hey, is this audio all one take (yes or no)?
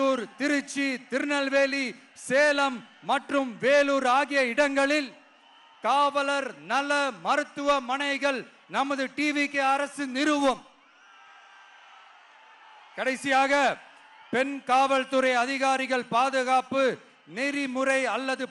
yes